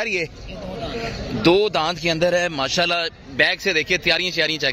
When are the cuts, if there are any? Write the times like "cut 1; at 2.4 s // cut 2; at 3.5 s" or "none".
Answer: none